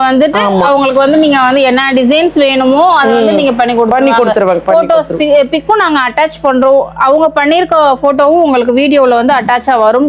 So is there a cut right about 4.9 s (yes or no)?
no